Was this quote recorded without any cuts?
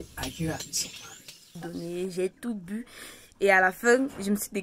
no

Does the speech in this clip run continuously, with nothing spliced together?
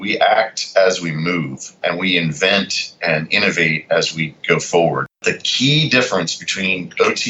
no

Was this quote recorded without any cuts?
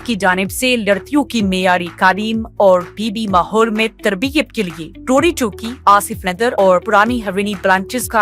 yes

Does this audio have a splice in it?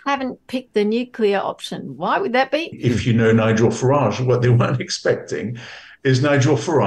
yes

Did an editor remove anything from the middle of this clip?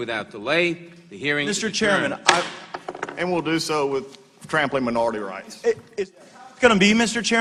no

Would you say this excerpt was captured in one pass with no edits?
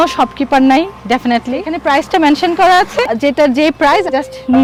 yes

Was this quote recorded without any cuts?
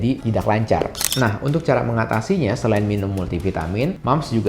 no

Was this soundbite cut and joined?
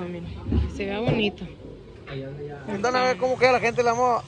yes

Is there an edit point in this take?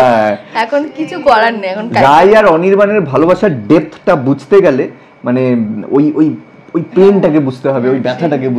no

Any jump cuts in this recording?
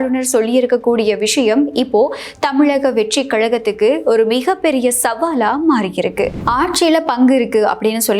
yes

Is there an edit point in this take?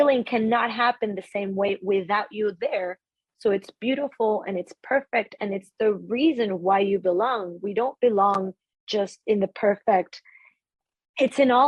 yes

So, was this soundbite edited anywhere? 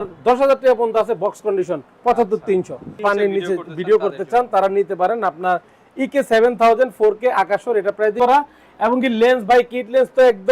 yes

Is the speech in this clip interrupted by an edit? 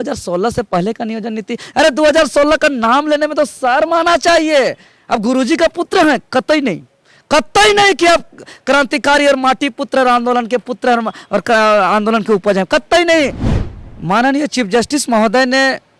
yes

